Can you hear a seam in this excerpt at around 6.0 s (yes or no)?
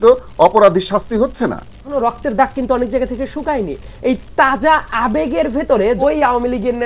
yes